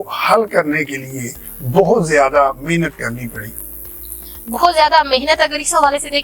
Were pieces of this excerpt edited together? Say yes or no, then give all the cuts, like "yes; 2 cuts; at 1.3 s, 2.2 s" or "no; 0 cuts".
no; 0 cuts